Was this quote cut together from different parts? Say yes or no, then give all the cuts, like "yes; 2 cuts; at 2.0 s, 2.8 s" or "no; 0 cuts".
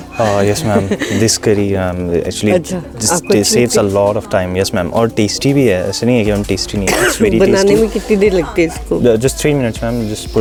no; 0 cuts